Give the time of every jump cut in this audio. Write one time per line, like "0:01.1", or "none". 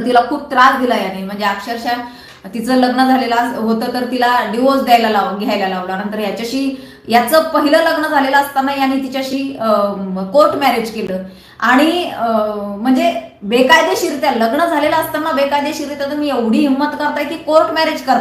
none